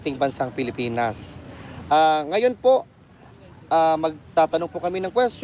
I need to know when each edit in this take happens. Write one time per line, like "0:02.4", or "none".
none